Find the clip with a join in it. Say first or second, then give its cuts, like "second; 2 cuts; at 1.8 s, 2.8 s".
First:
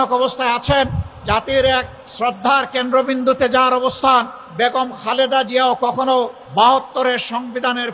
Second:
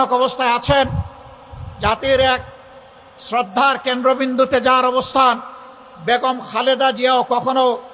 first; 4 cuts; at 1.1 s, 2.0 s, 4.4 s, 6.4 s